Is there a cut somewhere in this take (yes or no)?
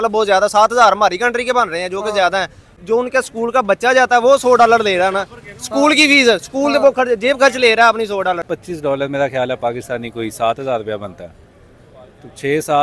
yes